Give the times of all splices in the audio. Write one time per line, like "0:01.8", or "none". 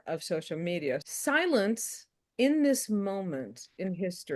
0:01.0